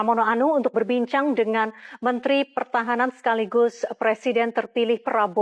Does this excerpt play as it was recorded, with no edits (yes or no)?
yes